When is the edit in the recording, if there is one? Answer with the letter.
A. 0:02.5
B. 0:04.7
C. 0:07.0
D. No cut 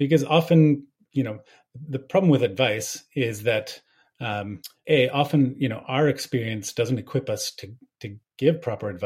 B